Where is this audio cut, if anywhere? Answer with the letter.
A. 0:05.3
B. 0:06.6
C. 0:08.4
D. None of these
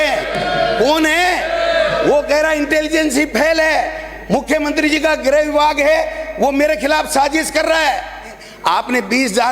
C